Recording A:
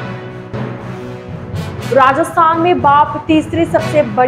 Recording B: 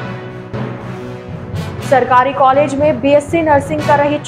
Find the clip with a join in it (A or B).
B